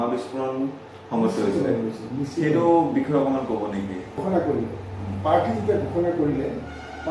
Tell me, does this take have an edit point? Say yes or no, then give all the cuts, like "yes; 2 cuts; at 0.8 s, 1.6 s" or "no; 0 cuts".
yes; 1 cut; at 4.2 s